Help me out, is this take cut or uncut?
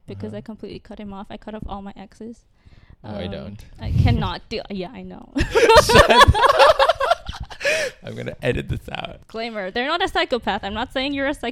cut